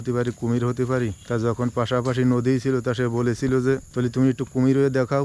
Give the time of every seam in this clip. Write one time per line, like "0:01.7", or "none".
0:01.2
0:03.9